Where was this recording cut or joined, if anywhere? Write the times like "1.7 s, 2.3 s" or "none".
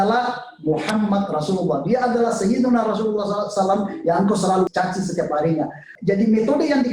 4.7 s, 5.8 s